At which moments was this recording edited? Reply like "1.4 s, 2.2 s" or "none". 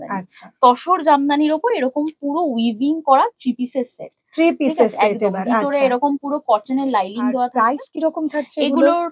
7.6 s